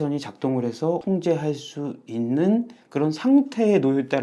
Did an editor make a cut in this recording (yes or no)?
no